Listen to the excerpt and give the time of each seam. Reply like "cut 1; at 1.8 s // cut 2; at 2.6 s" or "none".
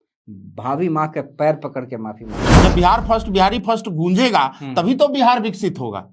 cut 1; at 2.4 s